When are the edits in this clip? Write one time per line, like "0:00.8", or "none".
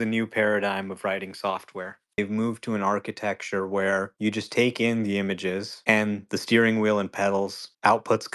0:02.2